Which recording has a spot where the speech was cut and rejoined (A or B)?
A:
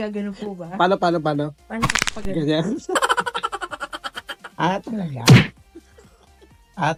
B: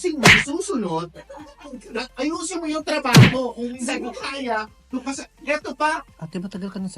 B